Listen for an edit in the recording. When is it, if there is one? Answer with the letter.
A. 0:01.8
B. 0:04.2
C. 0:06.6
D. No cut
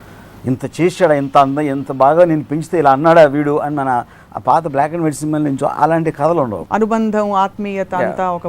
C